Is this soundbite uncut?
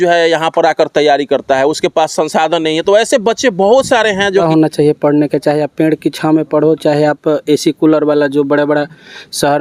no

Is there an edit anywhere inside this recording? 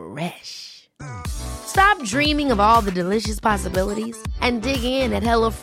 no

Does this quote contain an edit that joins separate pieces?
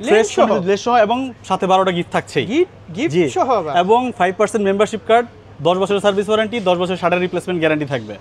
no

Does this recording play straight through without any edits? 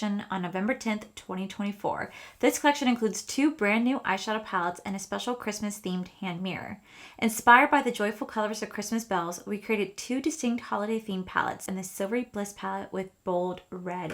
no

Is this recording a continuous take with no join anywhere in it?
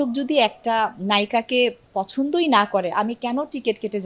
yes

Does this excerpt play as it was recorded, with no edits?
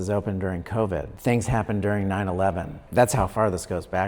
no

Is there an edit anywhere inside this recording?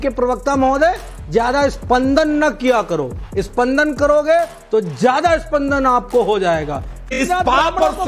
yes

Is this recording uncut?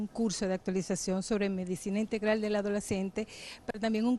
yes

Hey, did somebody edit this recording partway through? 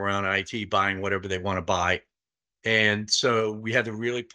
no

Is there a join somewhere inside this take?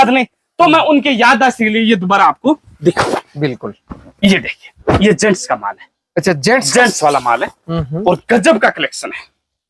no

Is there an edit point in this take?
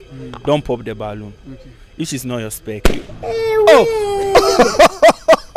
yes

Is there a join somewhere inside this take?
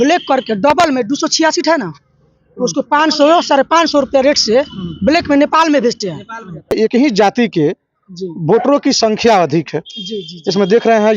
yes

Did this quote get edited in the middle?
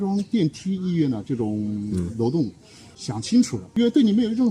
yes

